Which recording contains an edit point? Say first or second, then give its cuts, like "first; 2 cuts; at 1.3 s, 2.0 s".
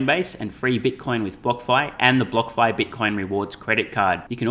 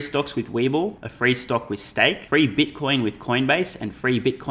second; 2 cuts; at 1.1 s, 2.2 s